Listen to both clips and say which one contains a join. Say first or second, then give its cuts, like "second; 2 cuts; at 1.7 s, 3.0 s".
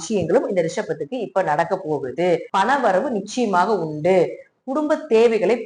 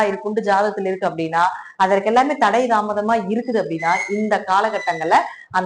first; 1 cut; at 2.5 s